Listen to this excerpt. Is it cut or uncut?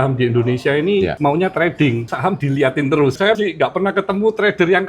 cut